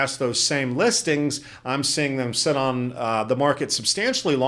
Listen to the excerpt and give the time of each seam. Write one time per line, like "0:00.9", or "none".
none